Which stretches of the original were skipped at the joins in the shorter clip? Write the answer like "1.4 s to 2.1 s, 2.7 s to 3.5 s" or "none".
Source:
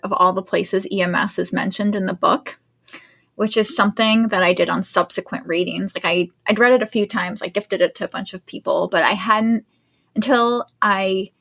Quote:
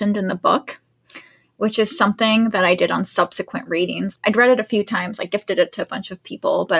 5.9 s to 6.4 s